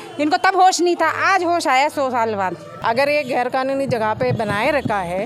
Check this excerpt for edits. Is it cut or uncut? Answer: cut